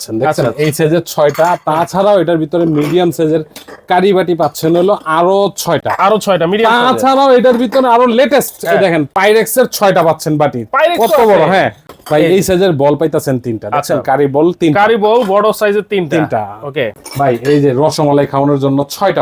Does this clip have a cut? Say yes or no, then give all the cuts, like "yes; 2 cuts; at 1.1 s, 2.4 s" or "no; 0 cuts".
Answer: no; 0 cuts